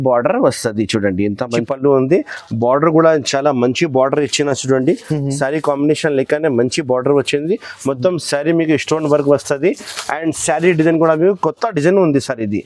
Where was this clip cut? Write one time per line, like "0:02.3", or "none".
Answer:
0:01.6